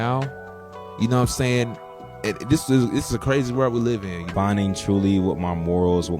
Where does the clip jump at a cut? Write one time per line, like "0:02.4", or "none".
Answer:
0:04.2